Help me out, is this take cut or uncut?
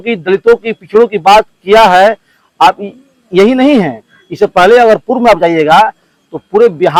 uncut